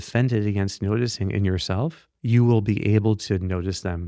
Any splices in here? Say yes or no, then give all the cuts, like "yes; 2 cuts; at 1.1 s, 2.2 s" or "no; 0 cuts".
yes; 1 cut; at 2.1 s